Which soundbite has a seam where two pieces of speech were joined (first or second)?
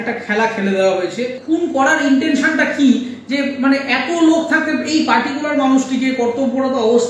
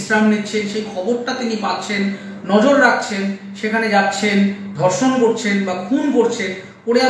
first